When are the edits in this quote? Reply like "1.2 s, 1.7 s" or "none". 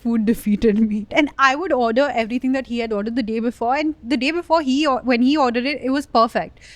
1.1 s